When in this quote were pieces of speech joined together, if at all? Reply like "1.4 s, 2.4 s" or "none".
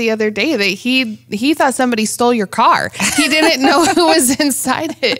none